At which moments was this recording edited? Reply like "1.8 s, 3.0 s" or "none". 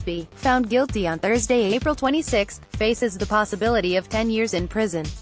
none